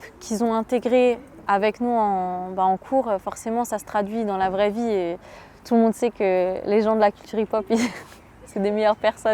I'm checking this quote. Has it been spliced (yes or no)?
no